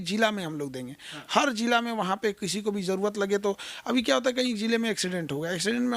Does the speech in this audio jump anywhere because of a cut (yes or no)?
no